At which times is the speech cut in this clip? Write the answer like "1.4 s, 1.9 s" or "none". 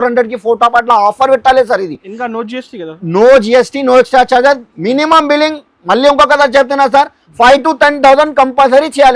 none